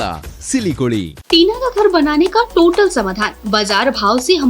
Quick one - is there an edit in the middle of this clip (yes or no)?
yes